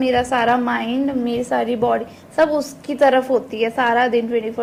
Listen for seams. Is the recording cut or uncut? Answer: uncut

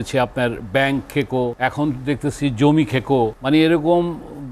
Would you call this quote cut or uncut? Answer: cut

